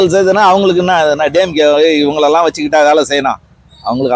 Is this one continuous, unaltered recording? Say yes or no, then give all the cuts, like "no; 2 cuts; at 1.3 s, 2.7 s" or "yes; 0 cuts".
yes; 0 cuts